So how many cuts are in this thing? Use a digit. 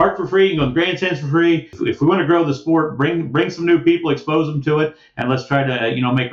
1